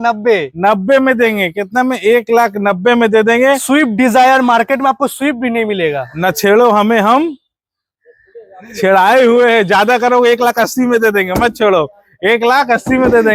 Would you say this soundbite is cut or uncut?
uncut